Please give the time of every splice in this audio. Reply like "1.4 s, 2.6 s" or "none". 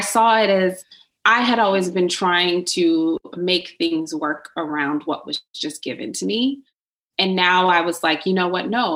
1.0 s